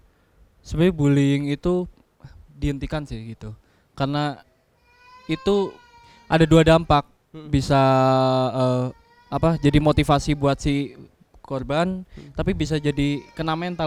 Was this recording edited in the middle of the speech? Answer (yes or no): no